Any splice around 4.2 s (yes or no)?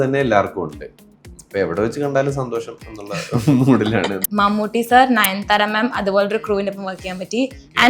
yes